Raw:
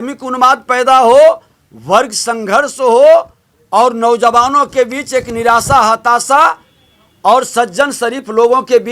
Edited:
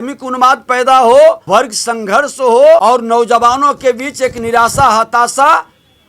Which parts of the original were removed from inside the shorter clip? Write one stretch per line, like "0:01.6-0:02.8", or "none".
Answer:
0:01.4-0:01.8
0:03.2-0:03.7